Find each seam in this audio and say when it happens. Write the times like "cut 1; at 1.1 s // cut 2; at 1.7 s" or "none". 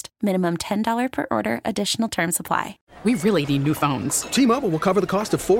cut 1; at 2.8 s